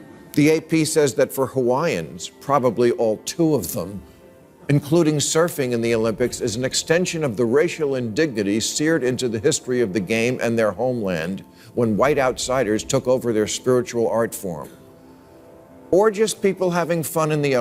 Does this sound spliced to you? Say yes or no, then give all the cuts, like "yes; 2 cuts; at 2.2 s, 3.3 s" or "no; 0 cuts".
no; 0 cuts